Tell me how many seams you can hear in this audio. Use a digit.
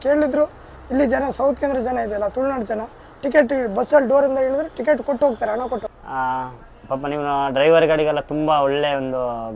1